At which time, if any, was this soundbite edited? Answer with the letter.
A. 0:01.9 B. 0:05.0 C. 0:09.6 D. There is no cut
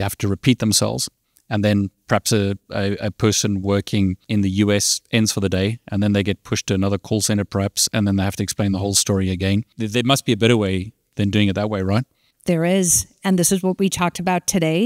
D